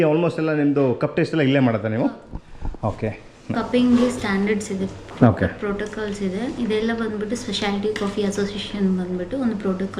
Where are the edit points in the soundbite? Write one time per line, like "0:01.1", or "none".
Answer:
0:03.5